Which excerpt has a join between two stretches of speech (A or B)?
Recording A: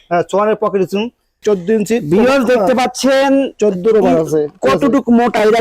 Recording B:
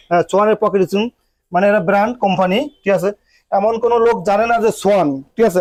A